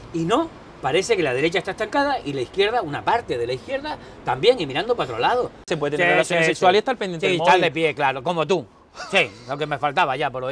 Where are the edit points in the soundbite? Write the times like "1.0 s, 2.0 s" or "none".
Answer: 5.7 s